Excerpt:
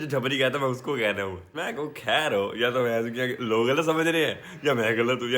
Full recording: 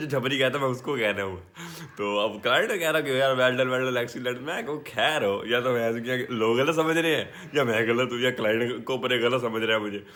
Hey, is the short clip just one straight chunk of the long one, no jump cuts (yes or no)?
no